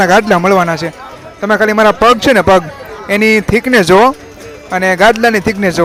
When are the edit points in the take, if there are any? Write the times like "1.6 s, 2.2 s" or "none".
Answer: none